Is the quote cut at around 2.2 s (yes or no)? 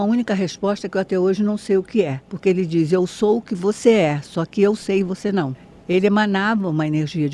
yes